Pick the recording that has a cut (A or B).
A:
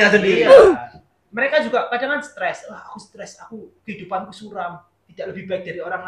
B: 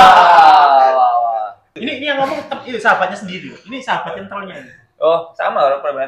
B